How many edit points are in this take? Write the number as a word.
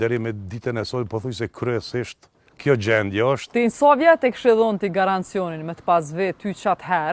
one